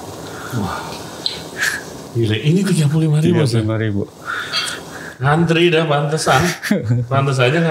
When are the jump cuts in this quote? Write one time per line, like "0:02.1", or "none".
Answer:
none